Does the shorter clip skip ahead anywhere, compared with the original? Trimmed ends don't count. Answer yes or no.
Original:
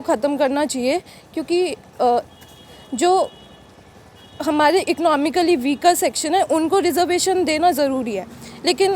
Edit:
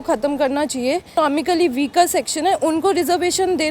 yes